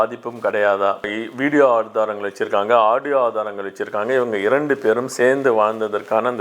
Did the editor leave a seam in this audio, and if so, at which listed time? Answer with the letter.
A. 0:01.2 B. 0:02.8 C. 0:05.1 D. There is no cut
A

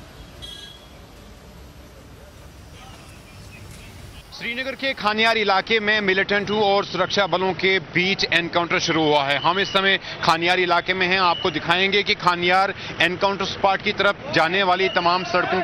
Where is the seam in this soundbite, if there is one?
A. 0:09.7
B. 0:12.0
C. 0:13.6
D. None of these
D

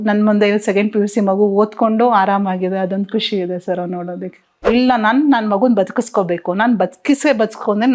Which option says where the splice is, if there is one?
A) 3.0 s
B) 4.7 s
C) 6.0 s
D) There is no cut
B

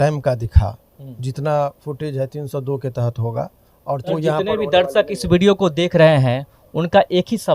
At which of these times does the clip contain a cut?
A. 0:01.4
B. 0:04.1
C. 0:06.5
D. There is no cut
B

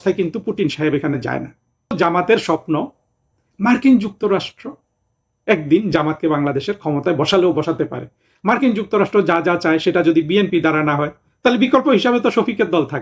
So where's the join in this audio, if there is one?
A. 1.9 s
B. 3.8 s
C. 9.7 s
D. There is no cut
A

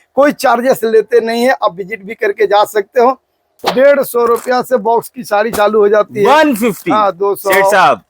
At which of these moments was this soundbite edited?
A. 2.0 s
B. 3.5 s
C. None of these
B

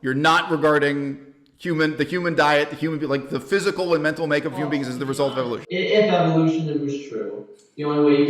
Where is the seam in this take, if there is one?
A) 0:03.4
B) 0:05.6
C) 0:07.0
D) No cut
B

